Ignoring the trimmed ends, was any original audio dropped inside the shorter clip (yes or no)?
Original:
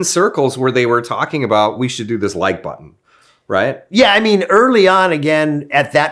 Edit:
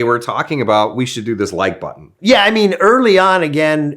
yes